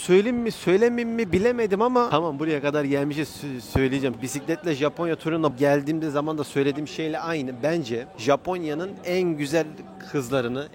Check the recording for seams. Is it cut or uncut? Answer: cut